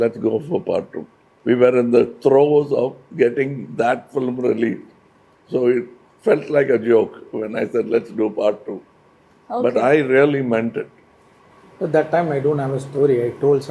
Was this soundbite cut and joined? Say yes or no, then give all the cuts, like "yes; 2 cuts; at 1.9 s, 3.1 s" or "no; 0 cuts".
no; 0 cuts